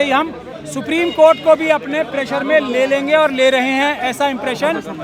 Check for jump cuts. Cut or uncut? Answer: uncut